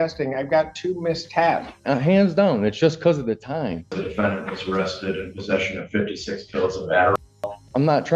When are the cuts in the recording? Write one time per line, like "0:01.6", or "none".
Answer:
0:01.7
0:04.0
0:07.2